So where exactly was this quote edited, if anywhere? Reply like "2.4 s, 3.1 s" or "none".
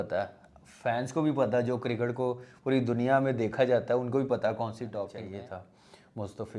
5.3 s